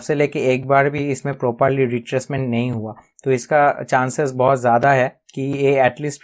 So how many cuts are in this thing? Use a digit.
0